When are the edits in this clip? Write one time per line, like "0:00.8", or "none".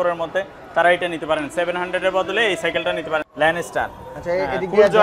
0:03.3